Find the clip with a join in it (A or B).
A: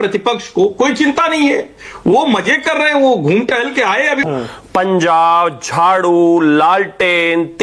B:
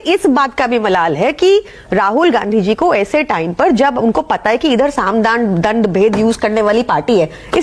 A